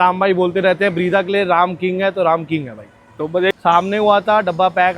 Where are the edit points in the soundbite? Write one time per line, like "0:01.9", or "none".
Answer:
0:03.5